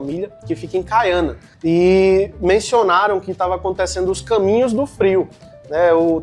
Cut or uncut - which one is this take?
cut